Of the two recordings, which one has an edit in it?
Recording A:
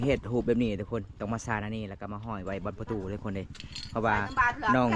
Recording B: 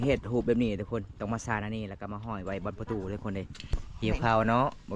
B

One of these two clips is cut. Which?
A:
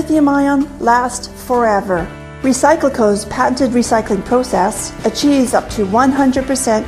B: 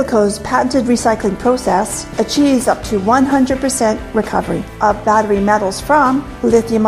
A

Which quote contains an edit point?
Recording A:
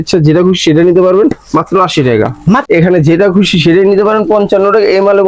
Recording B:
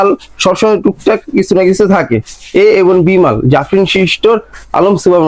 A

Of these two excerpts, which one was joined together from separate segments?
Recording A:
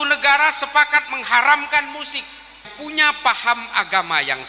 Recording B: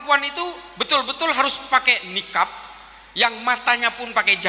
A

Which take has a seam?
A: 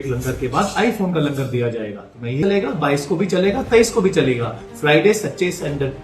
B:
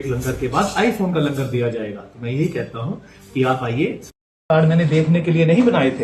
A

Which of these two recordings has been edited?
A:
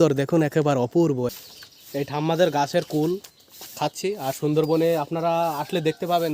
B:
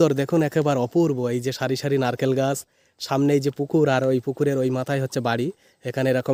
A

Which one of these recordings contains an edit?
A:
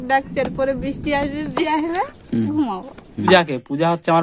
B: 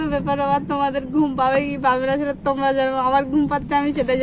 A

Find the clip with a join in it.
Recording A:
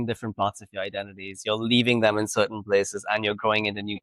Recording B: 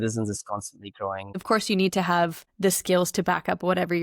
B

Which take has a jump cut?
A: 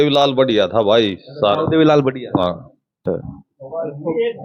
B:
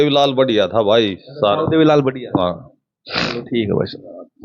A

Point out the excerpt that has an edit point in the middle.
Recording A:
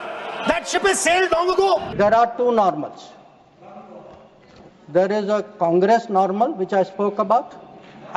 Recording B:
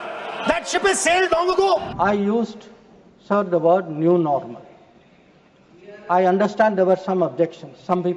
A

